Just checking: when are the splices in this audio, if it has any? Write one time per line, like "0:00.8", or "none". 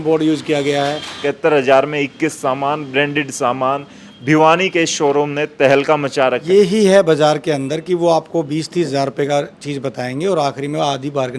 0:01.2
0:06.4